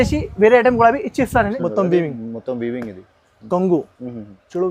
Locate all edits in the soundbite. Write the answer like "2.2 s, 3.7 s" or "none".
1.5 s